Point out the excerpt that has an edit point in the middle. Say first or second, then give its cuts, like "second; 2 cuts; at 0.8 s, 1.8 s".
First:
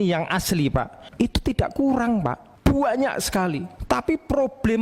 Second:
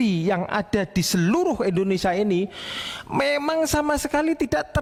first; 3 cuts; at 1.0 s, 2.5 s, 3.7 s